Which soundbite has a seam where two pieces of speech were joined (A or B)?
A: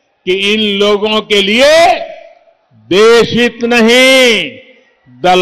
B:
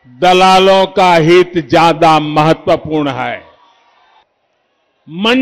B